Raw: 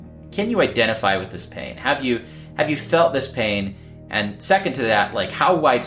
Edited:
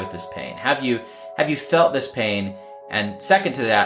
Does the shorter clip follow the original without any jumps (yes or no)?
yes